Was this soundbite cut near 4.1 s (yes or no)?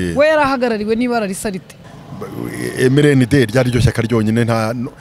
no